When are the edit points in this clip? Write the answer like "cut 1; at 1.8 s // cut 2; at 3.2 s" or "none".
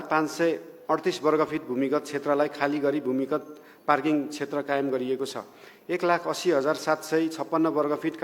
none